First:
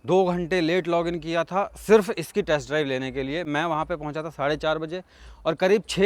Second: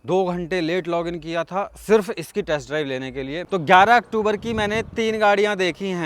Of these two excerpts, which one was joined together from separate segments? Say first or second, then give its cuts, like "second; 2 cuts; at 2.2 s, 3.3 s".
second; 1 cut; at 3.4 s